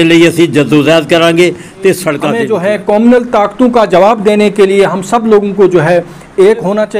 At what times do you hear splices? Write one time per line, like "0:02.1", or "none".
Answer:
0:02.3